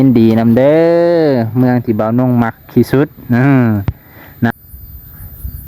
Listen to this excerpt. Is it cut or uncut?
cut